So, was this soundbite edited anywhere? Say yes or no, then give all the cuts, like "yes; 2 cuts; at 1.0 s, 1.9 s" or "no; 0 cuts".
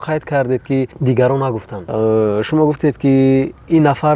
yes; 2 cuts; at 0.9 s, 1.7 s